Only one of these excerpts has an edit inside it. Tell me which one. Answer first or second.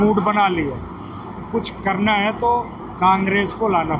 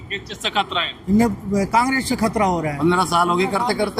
second